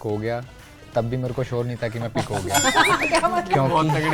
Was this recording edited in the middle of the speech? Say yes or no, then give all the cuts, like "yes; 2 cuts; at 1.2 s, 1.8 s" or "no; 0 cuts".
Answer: no; 0 cuts